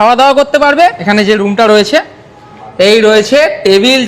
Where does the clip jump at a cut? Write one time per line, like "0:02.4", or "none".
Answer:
0:01.0